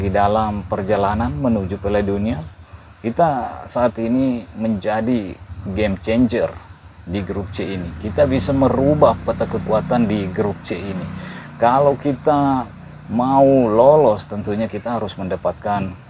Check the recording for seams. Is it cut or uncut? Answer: cut